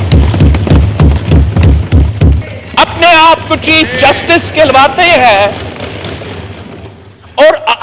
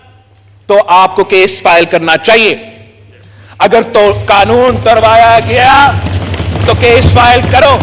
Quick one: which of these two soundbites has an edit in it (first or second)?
first